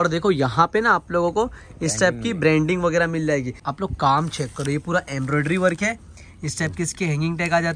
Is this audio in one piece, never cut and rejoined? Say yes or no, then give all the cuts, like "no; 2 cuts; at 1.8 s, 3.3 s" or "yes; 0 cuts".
no; 1 cut; at 3.6 s